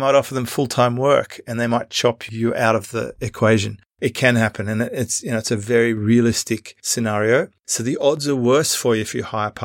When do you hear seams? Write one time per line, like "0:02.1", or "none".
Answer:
none